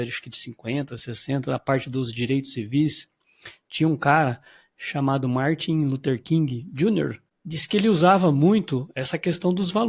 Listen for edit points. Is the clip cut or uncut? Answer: cut